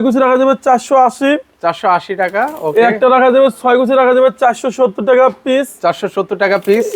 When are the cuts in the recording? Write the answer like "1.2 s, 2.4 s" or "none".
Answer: none